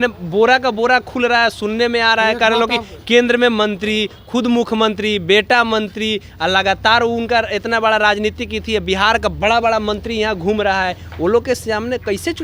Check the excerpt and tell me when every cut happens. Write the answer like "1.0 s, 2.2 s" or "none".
none

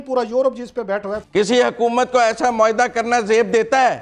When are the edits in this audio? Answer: 1.2 s

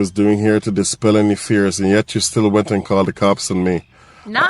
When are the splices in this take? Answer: none

